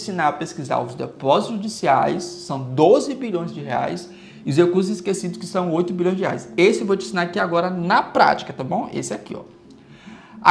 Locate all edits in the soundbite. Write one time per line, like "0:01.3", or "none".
none